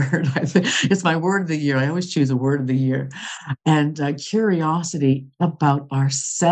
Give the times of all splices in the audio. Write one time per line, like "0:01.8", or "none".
none